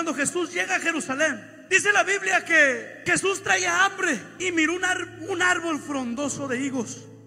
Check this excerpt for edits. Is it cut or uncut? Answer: cut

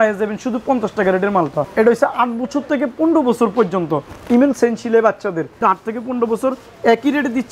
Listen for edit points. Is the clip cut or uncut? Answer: cut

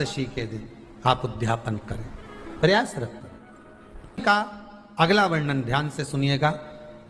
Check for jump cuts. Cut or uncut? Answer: cut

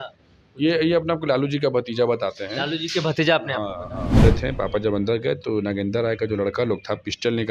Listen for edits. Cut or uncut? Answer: cut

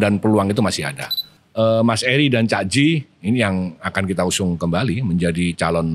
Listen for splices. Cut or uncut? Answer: cut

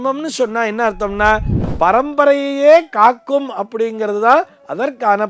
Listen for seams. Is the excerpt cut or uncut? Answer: cut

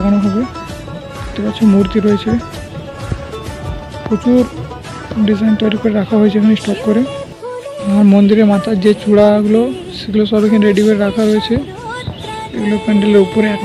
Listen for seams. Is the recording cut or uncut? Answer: uncut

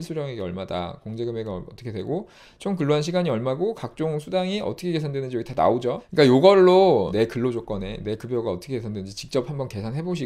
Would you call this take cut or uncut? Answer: cut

